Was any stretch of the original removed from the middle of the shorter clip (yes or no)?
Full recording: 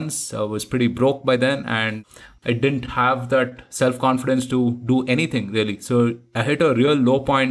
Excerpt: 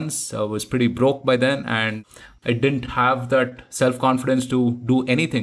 no